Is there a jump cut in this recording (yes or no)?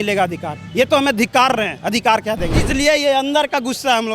yes